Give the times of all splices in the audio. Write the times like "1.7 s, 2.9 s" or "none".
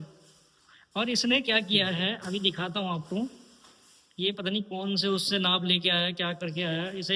none